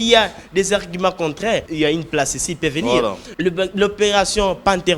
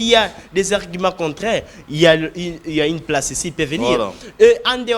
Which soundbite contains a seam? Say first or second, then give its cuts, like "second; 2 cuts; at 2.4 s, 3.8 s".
first; 2 cuts; at 1.7 s, 3.2 s